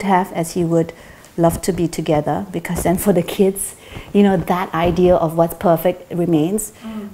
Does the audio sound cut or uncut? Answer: uncut